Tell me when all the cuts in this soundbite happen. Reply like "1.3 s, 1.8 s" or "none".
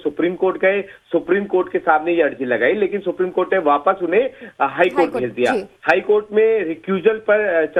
none